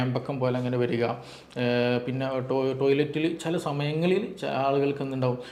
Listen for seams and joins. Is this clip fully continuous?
yes; 0 cuts

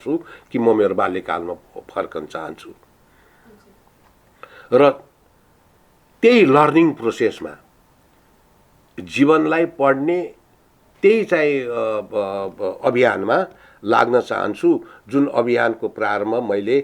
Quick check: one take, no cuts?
yes; 0 cuts

